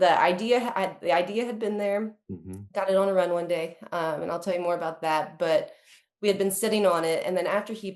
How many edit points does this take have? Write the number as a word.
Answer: zero